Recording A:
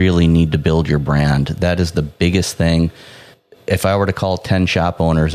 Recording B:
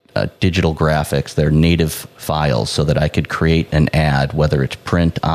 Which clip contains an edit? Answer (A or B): A